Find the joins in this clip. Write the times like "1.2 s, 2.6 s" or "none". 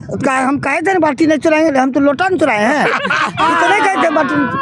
none